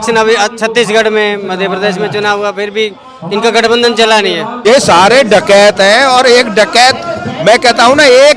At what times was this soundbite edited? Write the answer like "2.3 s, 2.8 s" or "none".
4.5 s